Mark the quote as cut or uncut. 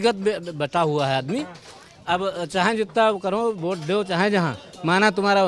uncut